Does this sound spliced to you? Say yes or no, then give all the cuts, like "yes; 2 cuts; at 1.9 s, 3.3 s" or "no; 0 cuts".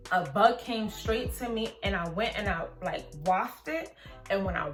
no; 0 cuts